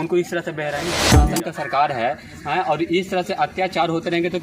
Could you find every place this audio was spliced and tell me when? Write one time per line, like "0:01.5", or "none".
0:01.0